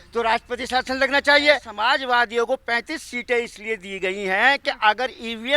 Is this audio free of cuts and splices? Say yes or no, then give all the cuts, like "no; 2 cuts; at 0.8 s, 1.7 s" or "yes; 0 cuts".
no; 1 cut; at 1.7 s